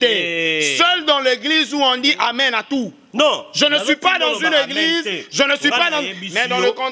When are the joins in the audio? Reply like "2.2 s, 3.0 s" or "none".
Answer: none